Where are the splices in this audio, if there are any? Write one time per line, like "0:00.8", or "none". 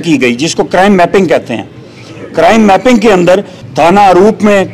0:03.6

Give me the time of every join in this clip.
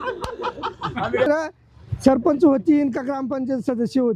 0:01.3

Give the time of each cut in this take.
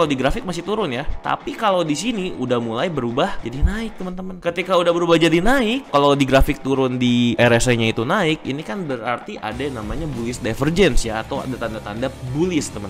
0:01.1
0:03.4

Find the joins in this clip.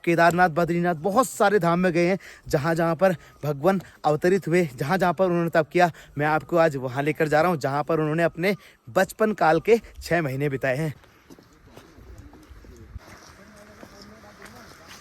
none

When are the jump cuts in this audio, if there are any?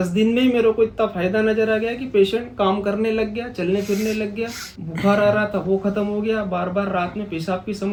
none

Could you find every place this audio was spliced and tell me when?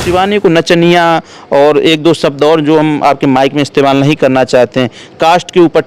none

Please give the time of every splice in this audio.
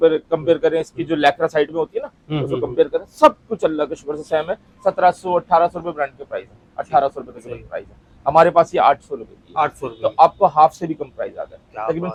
none

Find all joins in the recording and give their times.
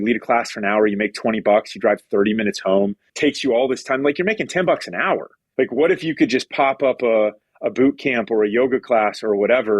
0:03.1
0:05.4

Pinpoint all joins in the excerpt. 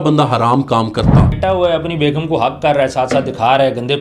0:01.4

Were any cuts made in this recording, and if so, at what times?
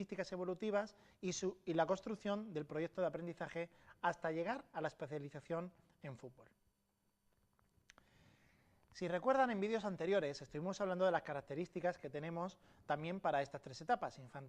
none

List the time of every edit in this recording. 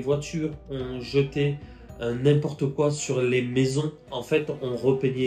0:04.2

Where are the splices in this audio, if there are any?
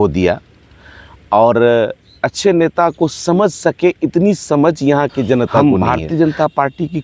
0:05.6

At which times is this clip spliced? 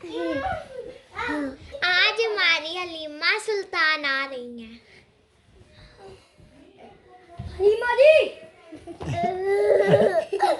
none

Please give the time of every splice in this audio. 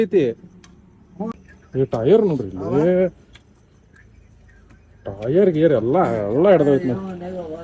0:01.3

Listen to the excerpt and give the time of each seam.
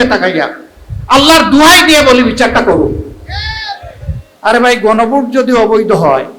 0:04.3

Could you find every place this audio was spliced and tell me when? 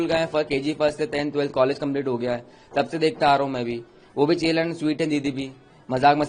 none

